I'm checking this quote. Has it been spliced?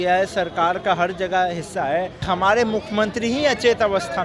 yes; 1 cut; at 2.2 s

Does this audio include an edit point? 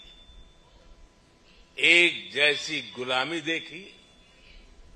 no; 0 cuts

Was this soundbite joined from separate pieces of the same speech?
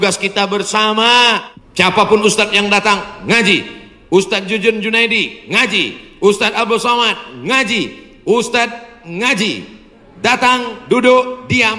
yes; 1 cut; at 1.5 s

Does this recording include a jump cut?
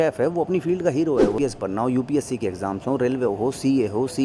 yes; 1 cut; at 1.4 s

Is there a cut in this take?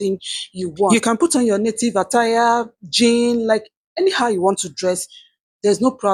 no; 0 cuts

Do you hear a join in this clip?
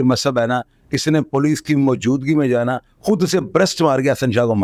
no; 0 cuts

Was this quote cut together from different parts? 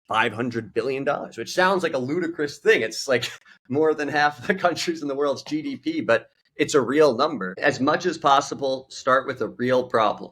yes; 1 cut; at 7.6 s

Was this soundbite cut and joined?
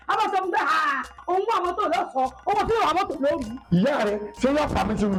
no; 0 cuts

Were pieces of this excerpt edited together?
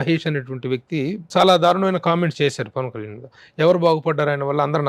yes; 1 cut; at 1.3 s

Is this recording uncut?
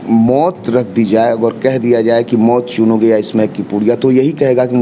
yes; 0 cuts

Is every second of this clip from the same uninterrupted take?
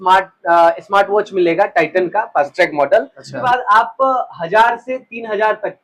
no; 1 cut; at 3.3 s

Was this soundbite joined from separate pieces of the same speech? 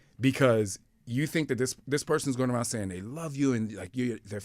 no; 0 cuts

